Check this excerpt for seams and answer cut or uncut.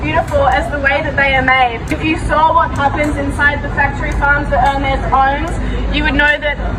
uncut